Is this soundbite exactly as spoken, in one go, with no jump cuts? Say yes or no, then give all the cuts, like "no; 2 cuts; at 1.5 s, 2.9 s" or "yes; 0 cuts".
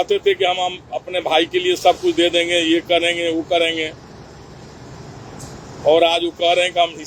yes; 0 cuts